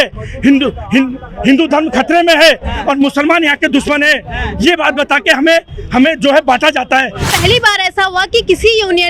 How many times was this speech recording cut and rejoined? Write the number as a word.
one